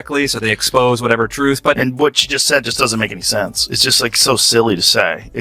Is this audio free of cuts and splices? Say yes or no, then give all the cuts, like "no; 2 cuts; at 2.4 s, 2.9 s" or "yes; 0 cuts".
no; 1 cut; at 1.8 s